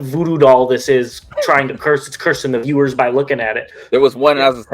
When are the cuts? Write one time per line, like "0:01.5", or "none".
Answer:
0:03.7